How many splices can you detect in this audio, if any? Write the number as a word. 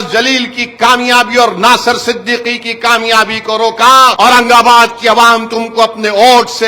one